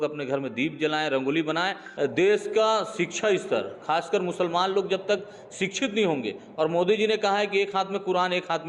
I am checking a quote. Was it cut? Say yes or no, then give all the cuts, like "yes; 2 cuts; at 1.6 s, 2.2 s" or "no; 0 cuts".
yes; 1 cut; at 1.8 s